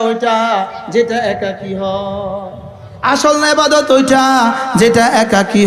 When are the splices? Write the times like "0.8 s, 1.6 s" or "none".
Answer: none